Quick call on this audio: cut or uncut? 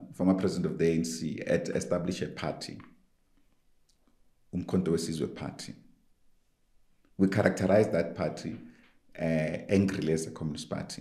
uncut